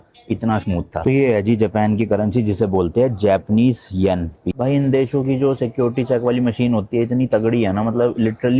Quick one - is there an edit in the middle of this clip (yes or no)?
yes